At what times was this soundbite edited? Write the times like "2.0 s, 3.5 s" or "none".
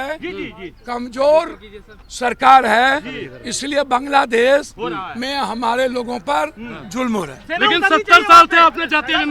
none